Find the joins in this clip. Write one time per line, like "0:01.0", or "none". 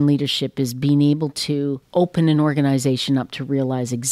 0:01.8